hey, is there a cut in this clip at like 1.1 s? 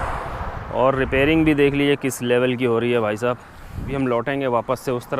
no; 1 cut; at 3.9 s

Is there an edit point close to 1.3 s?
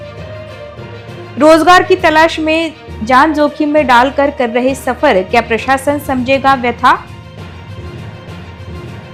no; 0 cuts

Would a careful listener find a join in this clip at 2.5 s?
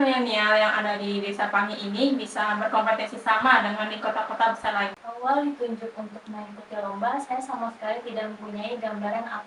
no; 1 cut; at 5.2 s

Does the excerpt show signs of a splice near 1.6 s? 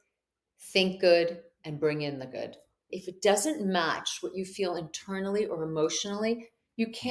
no; 1 cut; at 2.9 s

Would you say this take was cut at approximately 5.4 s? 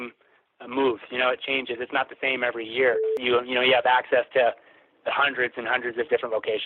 no; 1 cut; at 3.1 s

